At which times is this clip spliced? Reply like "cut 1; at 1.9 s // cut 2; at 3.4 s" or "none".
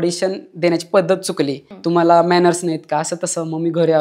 cut 1; at 1.7 s